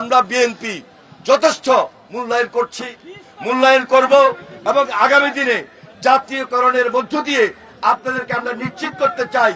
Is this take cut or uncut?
uncut